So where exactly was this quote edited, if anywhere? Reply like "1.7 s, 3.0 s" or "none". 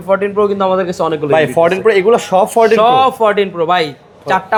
none